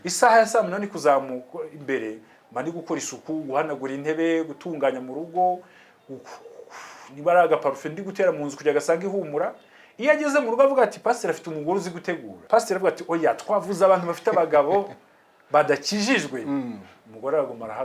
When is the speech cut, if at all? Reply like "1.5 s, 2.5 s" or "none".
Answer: 12.3 s